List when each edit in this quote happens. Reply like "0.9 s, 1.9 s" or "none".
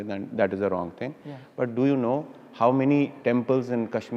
3.2 s